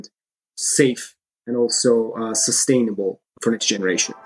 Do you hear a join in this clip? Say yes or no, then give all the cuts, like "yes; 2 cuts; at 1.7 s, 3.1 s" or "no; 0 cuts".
yes; 1 cut; at 3.4 s